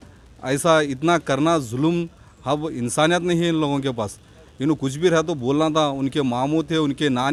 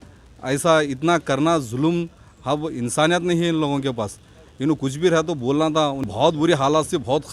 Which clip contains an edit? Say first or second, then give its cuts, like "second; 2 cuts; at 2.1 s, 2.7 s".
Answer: second; 1 cut; at 6.1 s